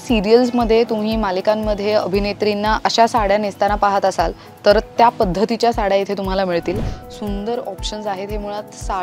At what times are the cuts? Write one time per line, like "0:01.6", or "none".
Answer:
0:02.8
0:06.8